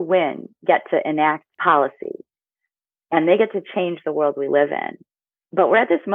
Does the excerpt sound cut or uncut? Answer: cut